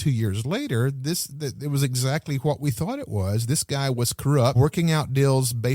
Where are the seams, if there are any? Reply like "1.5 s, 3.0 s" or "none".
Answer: 4.5 s

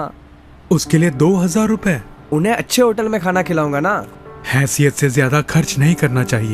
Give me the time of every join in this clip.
4.1 s

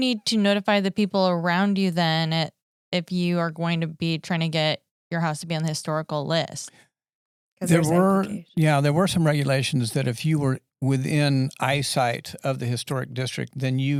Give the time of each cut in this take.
none

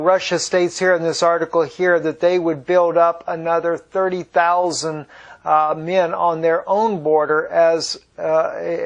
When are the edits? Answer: 1.7 s

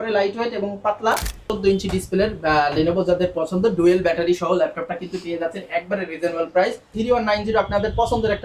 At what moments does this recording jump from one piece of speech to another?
1.5 s, 6.9 s

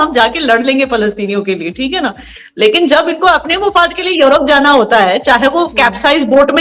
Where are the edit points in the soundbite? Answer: none

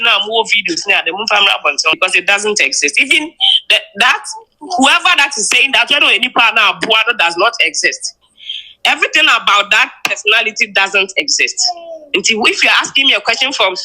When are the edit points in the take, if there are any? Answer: 2.0 s

